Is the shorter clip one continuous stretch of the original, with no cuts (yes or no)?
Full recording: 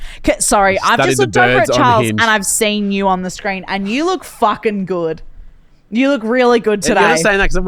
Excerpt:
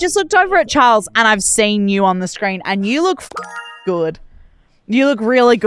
yes